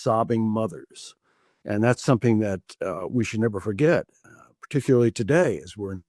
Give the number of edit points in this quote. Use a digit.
0